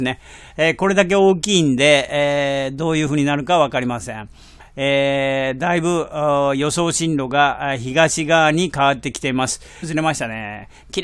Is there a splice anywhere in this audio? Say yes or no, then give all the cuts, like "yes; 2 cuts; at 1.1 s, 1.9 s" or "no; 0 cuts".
no; 0 cuts